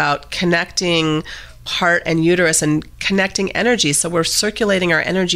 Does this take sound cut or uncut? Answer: cut